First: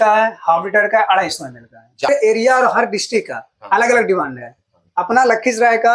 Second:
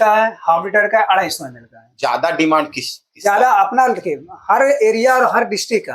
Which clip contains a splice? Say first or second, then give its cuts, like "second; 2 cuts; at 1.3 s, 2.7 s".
first; 1 cut; at 2.1 s